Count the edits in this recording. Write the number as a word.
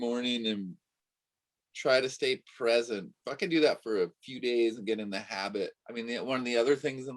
one